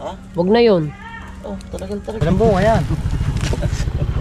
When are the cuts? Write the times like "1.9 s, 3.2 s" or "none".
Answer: 2.2 s